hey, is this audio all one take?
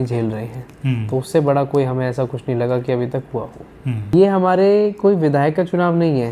no; 1 cut; at 4.1 s

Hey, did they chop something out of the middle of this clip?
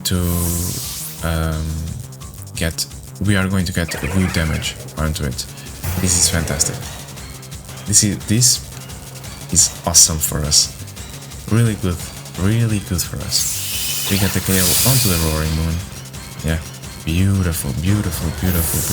yes; 1 cut; at 5.8 s

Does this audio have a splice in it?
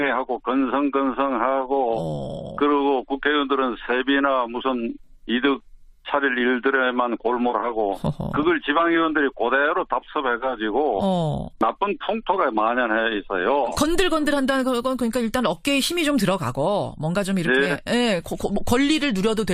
yes; 1 cut; at 2.8 s

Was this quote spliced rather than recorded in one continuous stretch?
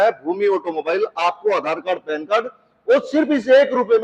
no; 0 cuts

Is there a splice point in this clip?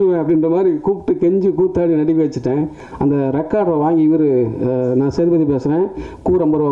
yes; 1 cut; at 2.8 s

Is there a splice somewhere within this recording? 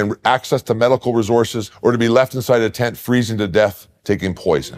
yes; 1 cut; at 1.6 s

